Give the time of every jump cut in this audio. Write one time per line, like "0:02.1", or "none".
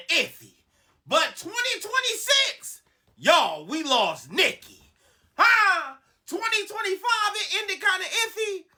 none